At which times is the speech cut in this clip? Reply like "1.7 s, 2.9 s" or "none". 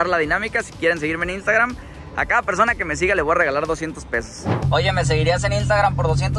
4.6 s